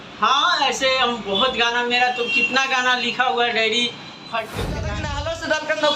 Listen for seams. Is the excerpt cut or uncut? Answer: cut